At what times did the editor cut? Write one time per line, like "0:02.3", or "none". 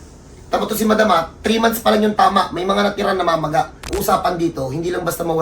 0:03.9

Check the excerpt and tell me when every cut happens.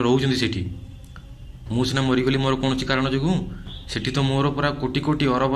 none

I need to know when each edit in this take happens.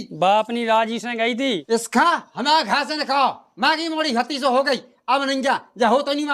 0:01.6

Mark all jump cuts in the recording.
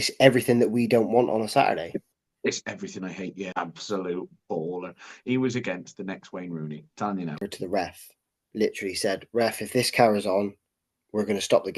0:03.6
0:07.4

